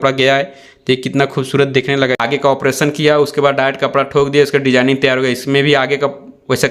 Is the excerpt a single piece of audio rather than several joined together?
yes; 0 cuts

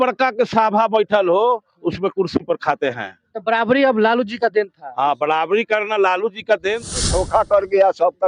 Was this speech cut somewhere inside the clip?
yes; 1 cut; at 7.0 s

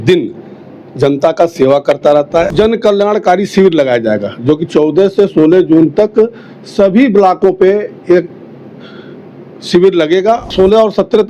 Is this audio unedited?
no; 2 cuts; at 2.5 s, 10.5 s

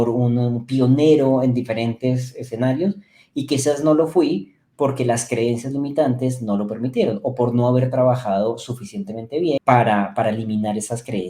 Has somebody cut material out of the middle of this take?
yes; 1 cut; at 9.6 s

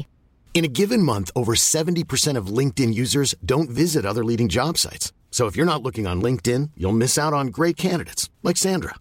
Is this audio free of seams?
yes; 0 cuts

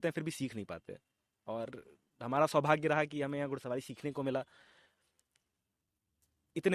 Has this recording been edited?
no; 0 cuts

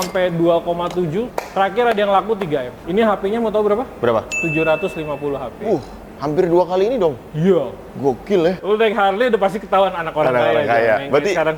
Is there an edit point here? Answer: yes; 3 cuts; at 1.4 s, 2.8 s, 8.6 s

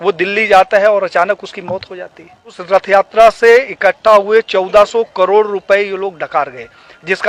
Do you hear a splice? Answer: yes; 1 cut; at 2.6 s

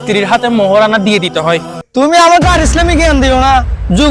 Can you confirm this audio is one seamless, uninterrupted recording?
no; 1 cut; at 1.8 s

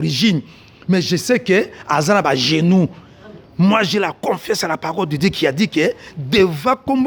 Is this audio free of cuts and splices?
yes; 0 cuts

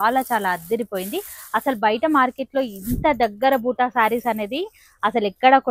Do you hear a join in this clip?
no; 0 cuts

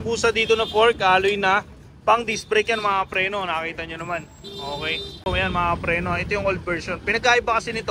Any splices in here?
yes; 1 cut; at 5.3 s

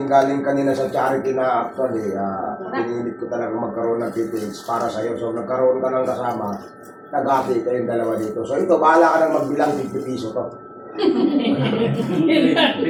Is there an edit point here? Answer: no; 0 cuts

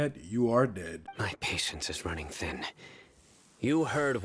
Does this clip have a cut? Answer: yes; 1 cut; at 1.0 s

